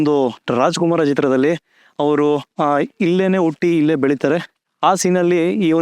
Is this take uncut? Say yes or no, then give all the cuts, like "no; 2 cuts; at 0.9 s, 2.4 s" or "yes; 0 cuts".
no; 1 cut; at 2.5 s